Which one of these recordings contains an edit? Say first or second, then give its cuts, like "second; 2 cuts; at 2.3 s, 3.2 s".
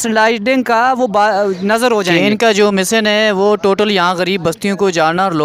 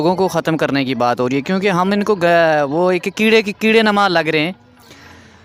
first; 1 cut; at 2.1 s